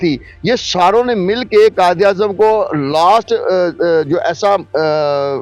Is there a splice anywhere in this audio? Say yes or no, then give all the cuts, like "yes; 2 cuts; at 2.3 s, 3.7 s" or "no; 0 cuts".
no; 0 cuts